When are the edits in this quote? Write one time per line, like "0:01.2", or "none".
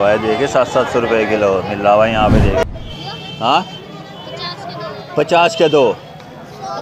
0:02.6